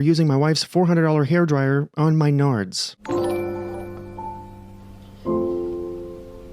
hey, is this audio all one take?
no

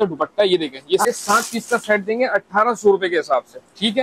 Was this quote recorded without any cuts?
no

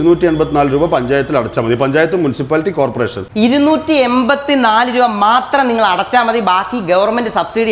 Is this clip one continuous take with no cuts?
yes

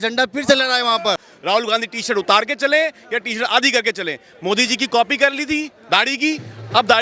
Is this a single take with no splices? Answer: no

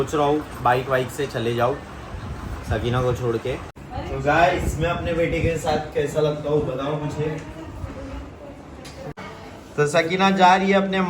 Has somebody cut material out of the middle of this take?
yes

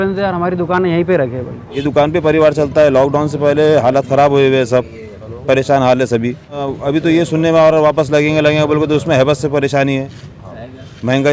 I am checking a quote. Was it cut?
yes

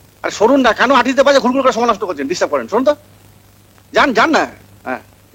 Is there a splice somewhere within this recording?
no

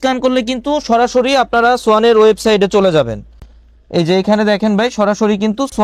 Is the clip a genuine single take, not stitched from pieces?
yes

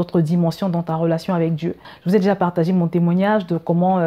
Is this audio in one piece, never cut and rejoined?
yes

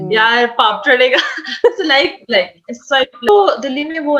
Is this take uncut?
no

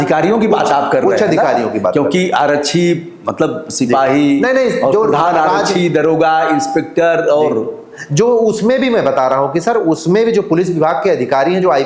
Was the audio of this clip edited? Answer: no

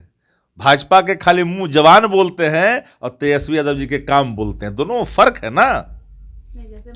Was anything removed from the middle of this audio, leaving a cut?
no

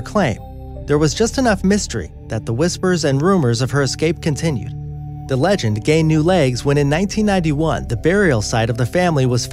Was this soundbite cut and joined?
no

